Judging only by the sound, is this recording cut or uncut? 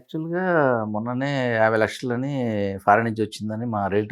uncut